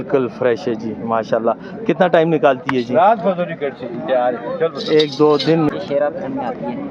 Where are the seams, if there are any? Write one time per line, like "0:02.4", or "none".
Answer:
0:05.7